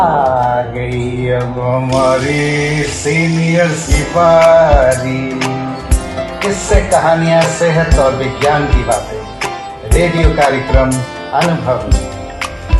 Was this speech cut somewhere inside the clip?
no; 0 cuts

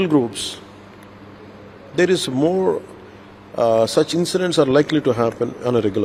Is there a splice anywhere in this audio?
no; 0 cuts

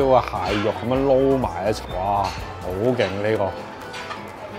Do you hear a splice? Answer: no; 0 cuts

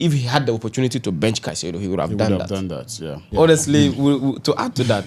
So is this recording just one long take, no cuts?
no; 1 cut; at 3.1 s

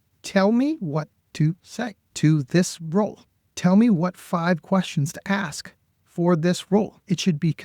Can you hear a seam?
yes; 1 cut; at 2.0 s

